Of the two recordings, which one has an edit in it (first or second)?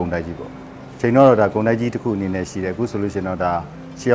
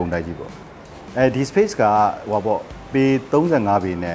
second